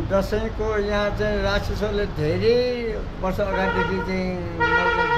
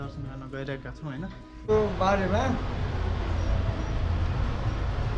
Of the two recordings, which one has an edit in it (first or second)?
second